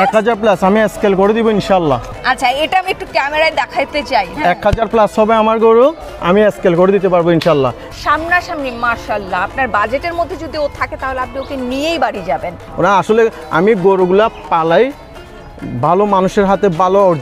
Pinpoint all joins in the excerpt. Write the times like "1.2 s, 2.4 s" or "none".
2.1 s, 7.8 s, 12.6 s